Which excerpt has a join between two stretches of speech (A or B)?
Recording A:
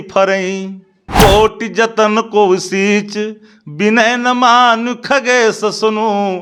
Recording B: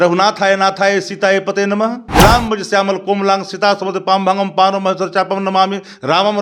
B